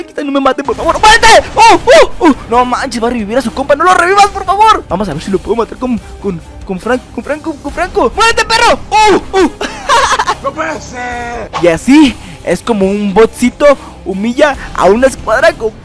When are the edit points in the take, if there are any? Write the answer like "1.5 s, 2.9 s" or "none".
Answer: 2.4 s, 4.8 s, 8.1 s, 11.5 s